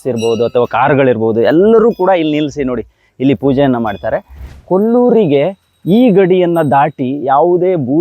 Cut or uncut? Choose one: cut